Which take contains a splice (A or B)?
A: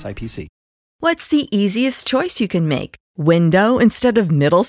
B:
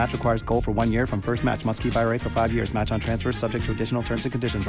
A